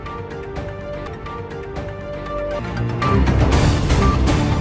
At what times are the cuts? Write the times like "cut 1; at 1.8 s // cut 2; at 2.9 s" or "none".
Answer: cut 1; at 1.1 s